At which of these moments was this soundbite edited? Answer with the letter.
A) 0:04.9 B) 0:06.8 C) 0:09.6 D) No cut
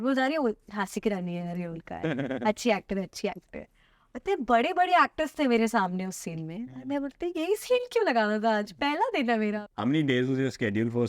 C